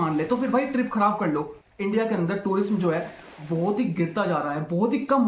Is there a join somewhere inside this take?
yes; 1 cut; at 1.6 s

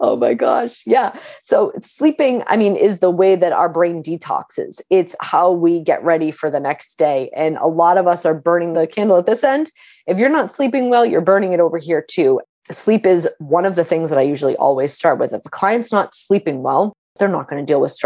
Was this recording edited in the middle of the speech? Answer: yes; 3 cuts; at 8.7 s, 12.5 s, 17.0 s

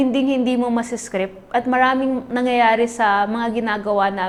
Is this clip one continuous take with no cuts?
yes; 0 cuts

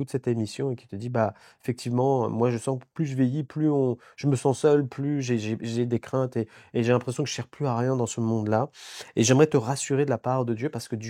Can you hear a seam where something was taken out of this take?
no; 0 cuts

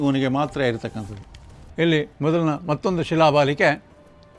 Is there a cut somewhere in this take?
no; 0 cuts

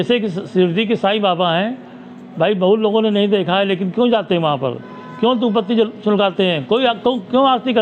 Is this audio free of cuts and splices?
yes; 0 cuts

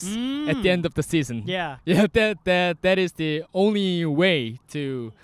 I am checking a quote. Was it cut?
no; 0 cuts

